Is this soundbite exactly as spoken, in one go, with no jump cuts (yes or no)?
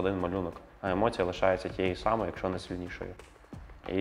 yes